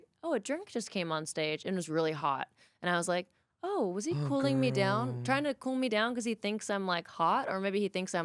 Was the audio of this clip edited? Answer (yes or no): no